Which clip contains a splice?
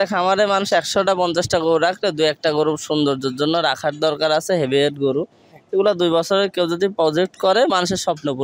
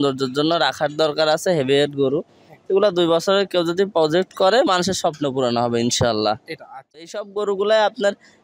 second; 1 cut; at 7.1 s

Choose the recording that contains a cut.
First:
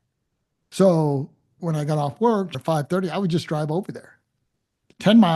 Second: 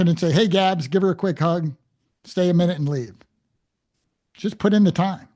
first; 1 cut; at 2.6 s

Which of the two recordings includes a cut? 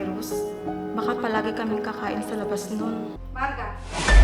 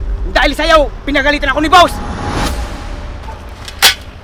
first; 1 cut; at 3.1 s

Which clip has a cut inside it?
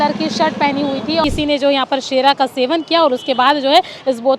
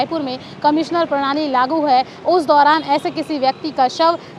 first; 1 cut; at 1.2 s

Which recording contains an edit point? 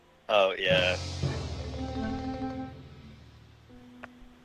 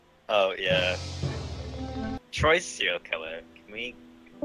second; 1 cut; at 2.2 s

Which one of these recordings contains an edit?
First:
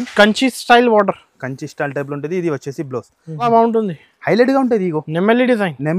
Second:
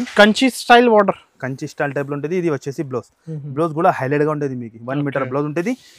first; 1 cut; at 3.5 s

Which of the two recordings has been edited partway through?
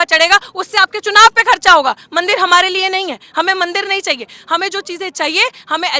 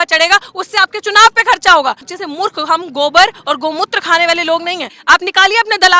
second; 2 cuts; at 2.1 s, 5.0 s

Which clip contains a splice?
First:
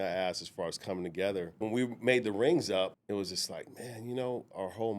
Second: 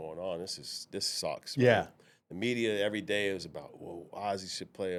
first; 2 cuts; at 1.6 s, 3.0 s

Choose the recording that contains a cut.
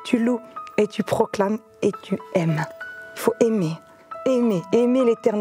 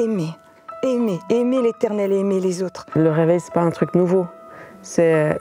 second; 1 cut; at 3.0 s

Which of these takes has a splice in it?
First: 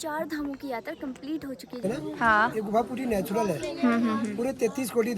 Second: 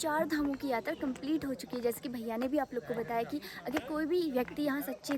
first; 1 cut; at 1.8 s

